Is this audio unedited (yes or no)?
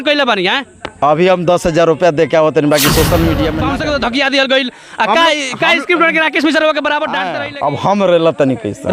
no